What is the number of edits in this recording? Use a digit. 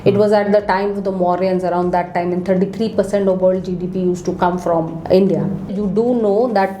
2